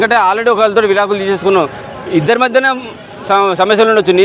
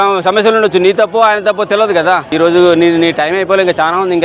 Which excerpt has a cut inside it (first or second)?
second